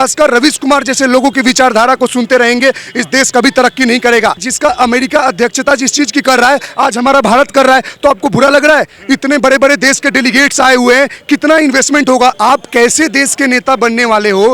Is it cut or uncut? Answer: cut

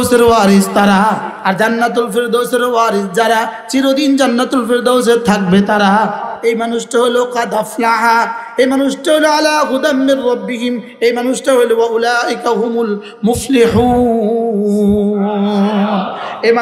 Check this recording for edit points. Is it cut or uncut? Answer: cut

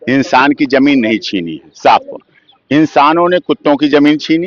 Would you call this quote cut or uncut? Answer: uncut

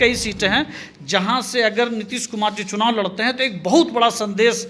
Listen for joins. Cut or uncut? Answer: uncut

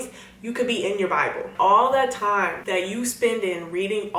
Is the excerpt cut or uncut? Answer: cut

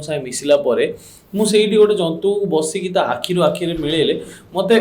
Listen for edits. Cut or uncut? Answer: uncut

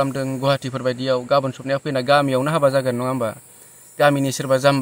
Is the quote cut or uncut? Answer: uncut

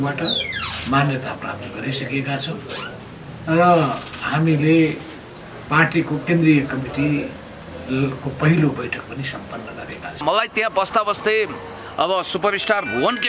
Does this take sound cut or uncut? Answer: cut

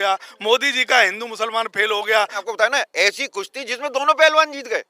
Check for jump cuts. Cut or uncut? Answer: cut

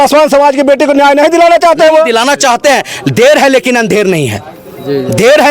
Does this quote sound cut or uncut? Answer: uncut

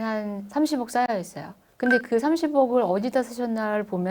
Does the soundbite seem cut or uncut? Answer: uncut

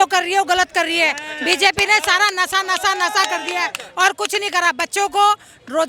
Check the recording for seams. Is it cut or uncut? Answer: uncut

